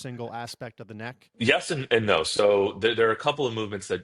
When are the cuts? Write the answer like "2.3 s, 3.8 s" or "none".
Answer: 1.2 s